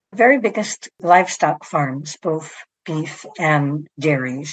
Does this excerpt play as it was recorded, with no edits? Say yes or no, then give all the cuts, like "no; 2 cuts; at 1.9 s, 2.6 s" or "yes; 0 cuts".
no; 1 cut; at 0.9 s